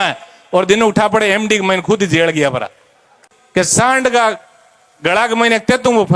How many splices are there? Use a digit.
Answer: 1